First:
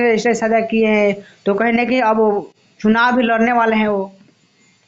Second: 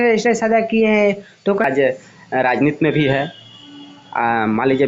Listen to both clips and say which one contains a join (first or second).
second